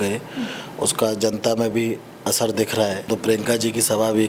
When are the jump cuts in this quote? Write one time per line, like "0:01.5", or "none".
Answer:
0:03.1